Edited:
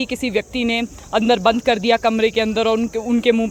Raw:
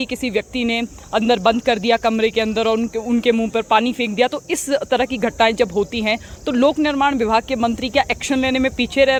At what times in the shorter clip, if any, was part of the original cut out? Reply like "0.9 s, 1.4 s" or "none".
none